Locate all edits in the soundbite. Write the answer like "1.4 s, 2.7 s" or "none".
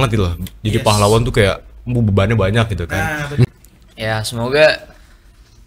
3.5 s